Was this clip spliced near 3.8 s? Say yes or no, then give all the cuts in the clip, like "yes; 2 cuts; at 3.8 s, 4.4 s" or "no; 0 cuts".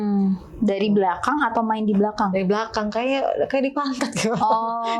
no; 0 cuts